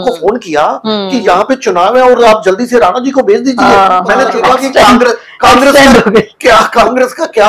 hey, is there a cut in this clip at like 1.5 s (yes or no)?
no